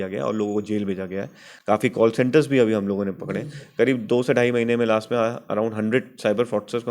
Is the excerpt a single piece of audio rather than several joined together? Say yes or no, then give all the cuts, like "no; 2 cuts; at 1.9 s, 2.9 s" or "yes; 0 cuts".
yes; 0 cuts